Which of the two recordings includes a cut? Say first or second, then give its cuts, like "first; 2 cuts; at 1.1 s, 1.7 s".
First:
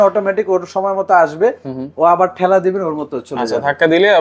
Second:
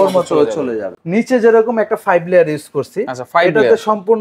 second; 1 cut; at 0.9 s